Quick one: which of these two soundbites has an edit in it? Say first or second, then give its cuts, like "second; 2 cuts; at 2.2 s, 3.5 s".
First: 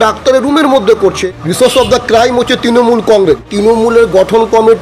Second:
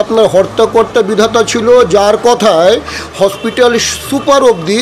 first; 2 cuts; at 1.0 s, 3.5 s